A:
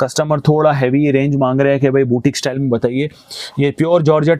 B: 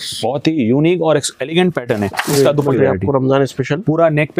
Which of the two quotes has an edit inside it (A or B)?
B